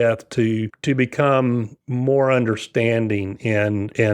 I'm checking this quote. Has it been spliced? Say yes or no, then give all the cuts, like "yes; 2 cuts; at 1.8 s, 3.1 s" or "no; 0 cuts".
no; 0 cuts